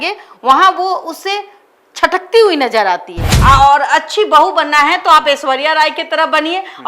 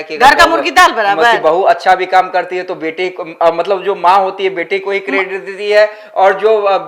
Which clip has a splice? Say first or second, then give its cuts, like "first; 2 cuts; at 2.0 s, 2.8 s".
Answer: first; 1 cut; at 3.2 s